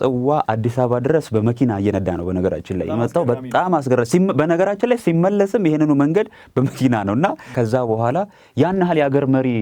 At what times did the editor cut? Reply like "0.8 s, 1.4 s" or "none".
7.5 s